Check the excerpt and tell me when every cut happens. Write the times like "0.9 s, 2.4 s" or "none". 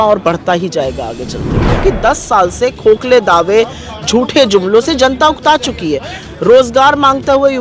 1.8 s